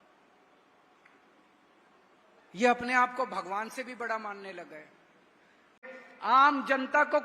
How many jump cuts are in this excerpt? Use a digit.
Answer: 1